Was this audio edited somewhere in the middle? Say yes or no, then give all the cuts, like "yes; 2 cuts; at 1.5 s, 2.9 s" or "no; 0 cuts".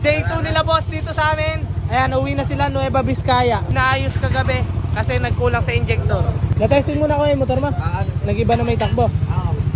yes; 2 cuts; at 3.7 s, 6.3 s